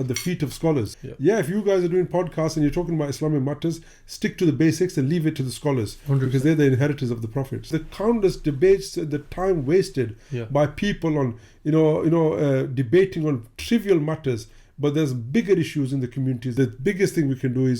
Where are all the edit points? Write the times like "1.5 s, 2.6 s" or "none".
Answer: 0.9 s, 7.8 s, 16.5 s